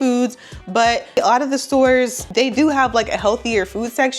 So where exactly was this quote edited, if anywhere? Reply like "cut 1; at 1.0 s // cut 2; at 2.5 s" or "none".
cut 1; at 1.2 s // cut 2; at 2.2 s